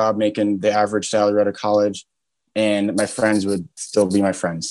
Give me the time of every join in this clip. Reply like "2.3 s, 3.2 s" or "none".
3.7 s